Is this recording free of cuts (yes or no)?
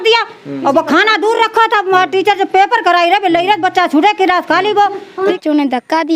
no